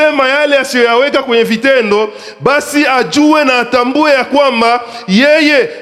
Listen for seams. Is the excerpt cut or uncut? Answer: uncut